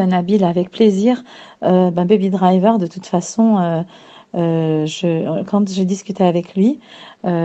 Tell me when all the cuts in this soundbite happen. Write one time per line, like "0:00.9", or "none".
none